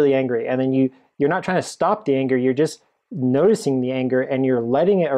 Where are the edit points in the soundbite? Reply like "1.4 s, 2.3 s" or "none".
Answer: none